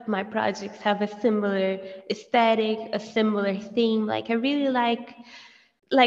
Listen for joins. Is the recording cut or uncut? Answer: uncut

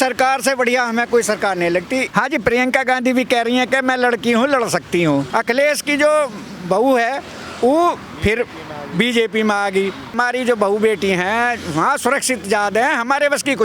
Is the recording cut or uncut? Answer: cut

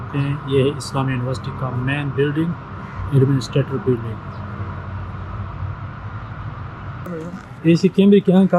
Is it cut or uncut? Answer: cut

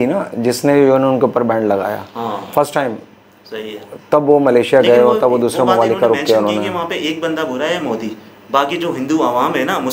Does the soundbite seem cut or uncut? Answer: uncut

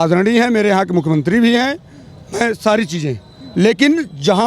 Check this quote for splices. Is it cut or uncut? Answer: uncut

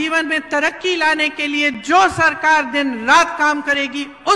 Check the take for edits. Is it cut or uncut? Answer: uncut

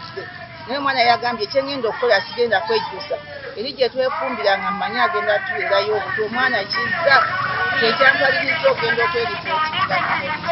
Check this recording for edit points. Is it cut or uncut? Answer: uncut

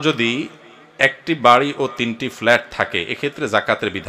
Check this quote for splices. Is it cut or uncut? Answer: uncut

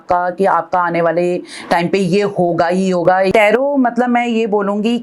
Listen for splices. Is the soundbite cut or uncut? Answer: cut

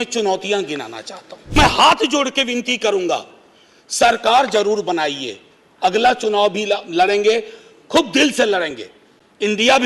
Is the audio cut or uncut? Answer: cut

